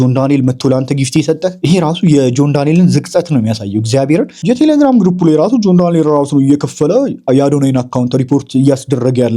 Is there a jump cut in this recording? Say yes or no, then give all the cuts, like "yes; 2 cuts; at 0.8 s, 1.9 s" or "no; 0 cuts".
yes; 2 cuts; at 1.6 s, 4.4 s